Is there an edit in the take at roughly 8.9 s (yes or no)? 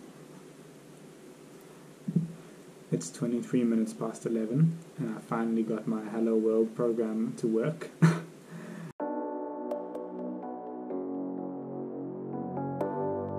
yes